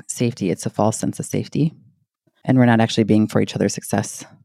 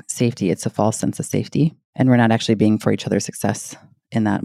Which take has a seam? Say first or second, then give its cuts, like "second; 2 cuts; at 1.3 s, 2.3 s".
second; 1 cut; at 1.8 s